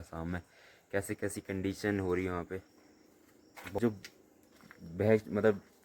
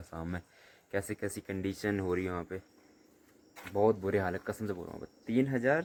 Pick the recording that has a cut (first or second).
first